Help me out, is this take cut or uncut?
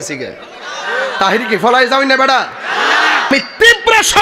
cut